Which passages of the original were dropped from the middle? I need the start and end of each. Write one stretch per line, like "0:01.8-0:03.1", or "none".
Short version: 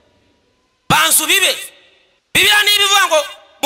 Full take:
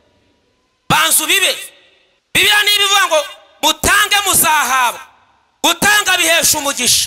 none

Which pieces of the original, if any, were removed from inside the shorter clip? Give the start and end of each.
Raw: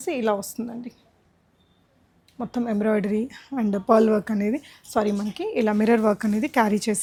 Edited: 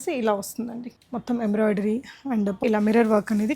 0:00.9-0:02.2
0:03.8-0:05.5

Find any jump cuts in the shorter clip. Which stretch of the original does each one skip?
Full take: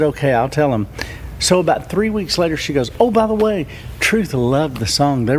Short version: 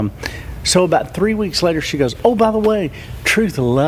none

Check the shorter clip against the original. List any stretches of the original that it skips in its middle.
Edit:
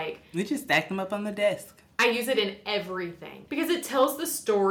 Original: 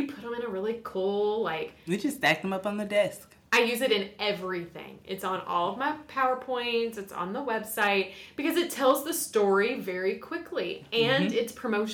0:04.9-0:08.2

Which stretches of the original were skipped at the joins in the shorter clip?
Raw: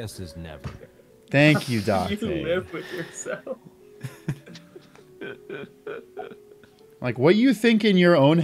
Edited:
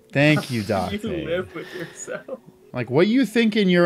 0:03.7-0:06.8

